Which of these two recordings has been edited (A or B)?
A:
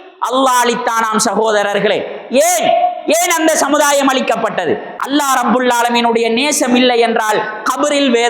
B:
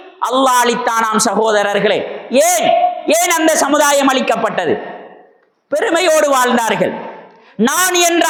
A